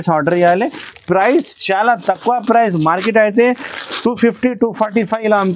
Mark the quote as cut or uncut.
uncut